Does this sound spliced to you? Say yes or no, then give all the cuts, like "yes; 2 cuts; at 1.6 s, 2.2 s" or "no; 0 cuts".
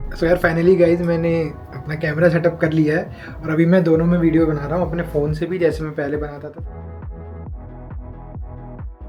no; 0 cuts